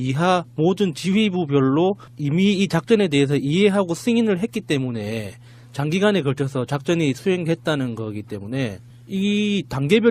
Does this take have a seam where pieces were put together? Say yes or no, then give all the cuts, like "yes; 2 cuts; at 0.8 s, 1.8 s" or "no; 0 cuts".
no; 0 cuts